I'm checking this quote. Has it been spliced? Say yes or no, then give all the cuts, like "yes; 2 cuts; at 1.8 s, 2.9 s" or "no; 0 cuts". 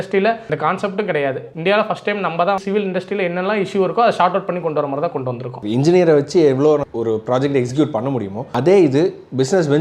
yes; 3 cuts; at 2.6 s, 5.5 s, 6.9 s